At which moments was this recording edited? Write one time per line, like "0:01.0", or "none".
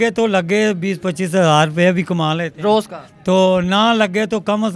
none